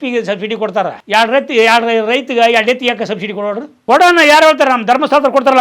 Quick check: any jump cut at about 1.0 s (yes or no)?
yes